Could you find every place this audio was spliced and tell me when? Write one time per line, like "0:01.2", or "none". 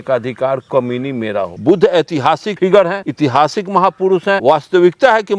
0:01.6
0:02.5
0:03.0
0:04.4